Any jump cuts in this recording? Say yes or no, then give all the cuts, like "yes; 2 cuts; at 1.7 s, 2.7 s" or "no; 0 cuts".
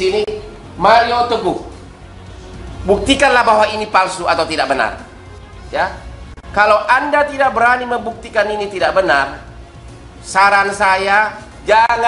no; 0 cuts